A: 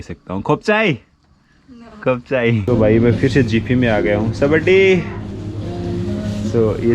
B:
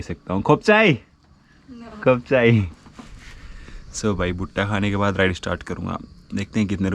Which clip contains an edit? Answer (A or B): A